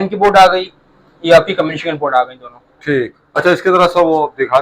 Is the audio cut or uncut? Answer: uncut